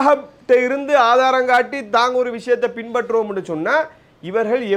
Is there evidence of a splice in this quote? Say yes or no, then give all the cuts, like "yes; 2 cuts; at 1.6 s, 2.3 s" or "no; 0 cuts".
no; 0 cuts